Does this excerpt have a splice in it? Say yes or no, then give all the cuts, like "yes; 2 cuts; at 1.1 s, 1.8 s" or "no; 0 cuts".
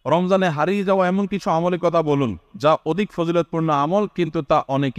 no; 0 cuts